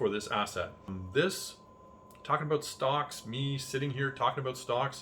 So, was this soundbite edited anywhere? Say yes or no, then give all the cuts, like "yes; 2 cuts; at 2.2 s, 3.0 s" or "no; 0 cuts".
yes; 1 cut; at 1.0 s